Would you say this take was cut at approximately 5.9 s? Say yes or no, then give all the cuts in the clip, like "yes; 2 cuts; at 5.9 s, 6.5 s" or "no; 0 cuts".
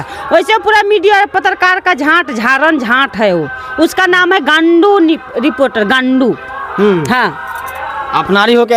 no; 0 cuts